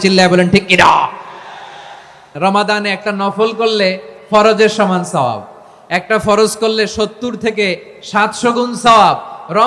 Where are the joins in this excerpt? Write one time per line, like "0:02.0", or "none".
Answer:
0:02.3